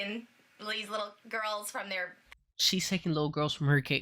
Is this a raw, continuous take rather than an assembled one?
no; 1 cut; at 2.2 s

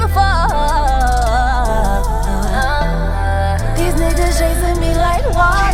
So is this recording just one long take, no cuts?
yes; 0 cuts

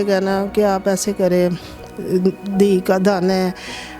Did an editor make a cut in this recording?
no; 0 cuts

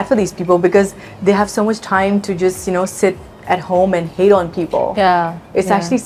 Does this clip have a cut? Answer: no; 0 cuts

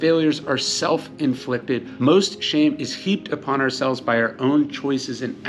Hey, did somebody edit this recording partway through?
no; 0 cuts

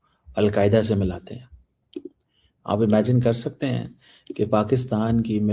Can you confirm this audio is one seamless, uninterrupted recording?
yes; 0 cuts

